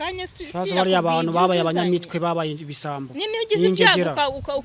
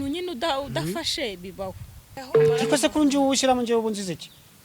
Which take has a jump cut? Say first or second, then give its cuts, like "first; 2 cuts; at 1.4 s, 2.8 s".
second; 1 cut; at 2.2 s